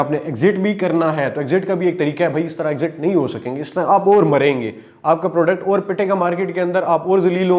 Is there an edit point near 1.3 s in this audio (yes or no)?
no